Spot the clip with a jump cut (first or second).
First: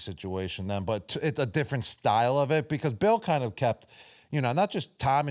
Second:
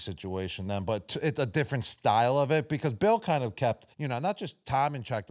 second